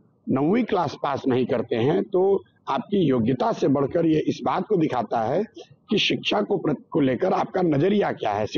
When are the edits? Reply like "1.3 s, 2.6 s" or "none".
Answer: none